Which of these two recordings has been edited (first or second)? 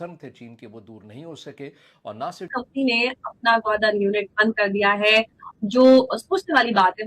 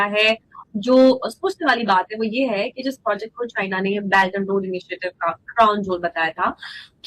first